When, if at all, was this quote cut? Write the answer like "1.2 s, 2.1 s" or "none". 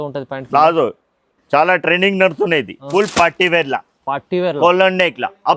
2.8 s